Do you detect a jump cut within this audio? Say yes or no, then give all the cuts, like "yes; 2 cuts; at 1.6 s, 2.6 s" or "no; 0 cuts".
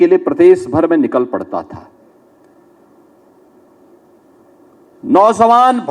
no; 0 cuts